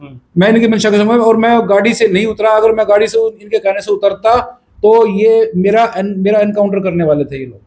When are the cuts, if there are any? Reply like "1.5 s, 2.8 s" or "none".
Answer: none